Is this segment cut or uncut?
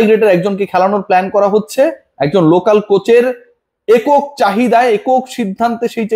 uncut